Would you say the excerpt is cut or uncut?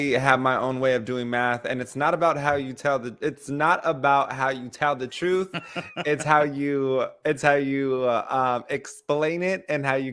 uncut